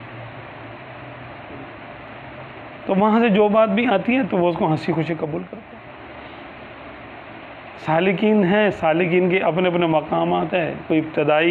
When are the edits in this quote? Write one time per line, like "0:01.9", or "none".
0:05.5